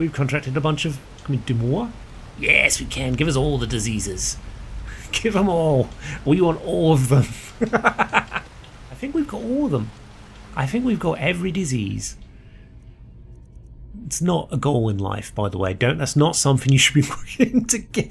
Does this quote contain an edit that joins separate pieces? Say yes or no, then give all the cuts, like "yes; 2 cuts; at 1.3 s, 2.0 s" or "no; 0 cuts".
yes; 1 cut; at 8.9 s